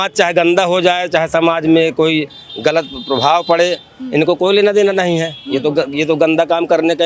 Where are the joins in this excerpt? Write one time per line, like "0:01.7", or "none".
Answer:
none